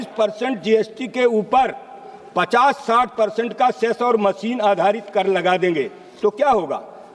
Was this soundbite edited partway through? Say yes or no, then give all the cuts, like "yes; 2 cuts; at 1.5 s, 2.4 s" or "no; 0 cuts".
no; 0 cuts